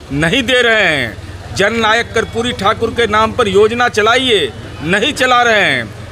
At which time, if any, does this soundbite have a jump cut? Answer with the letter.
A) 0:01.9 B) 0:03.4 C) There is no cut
C